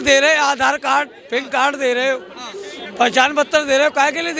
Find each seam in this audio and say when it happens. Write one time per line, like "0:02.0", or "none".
none